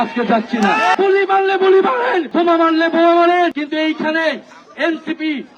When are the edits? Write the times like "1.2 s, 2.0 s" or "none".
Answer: 1.0 s, 2.3 s, 3.6 s